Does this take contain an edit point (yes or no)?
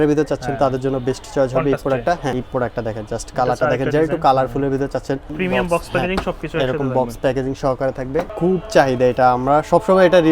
yes